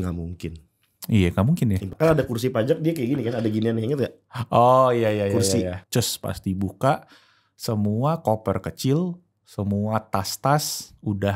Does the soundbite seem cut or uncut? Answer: cut